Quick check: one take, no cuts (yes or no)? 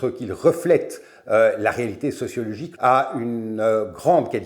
no